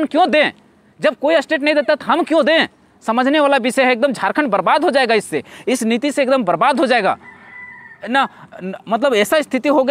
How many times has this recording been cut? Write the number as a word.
zero